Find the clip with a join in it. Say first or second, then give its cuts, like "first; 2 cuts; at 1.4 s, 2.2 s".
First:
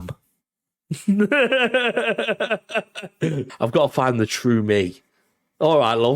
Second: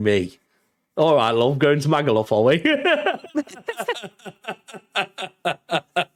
first; 1 cut; at 3.4 s